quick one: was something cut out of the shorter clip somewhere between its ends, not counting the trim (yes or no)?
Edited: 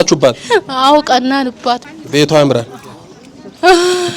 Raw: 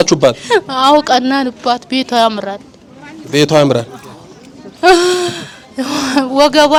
yes